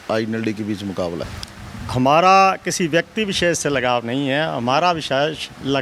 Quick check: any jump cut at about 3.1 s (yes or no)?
no